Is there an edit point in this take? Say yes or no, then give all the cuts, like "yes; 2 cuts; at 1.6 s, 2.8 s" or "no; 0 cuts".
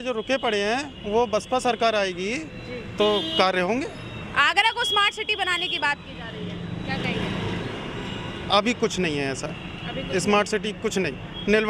no; 0 cuts